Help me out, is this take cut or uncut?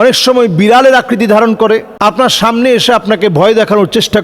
cut